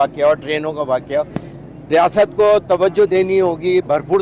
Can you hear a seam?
no; 0 cuts

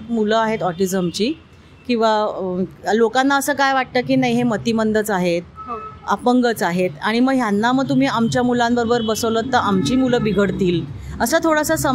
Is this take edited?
no; 0 cuts

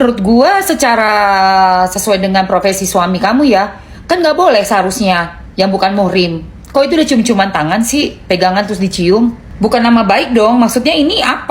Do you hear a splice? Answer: yes; 1 cut; at 9.5 s

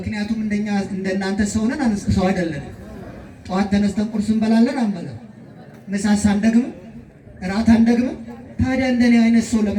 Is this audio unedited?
yes; 0 cuts

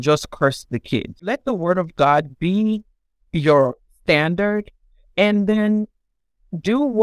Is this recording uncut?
no; 1 cut; at 1.2 s

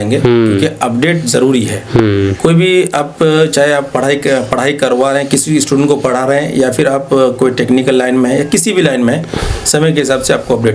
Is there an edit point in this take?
no; 0 cuts

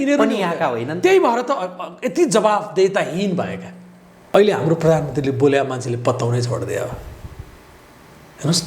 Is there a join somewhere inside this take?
yes; 1 cut; at 4.1 s

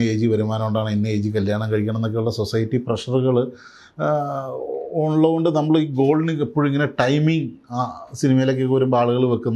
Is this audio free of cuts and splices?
yes; 0 cuts

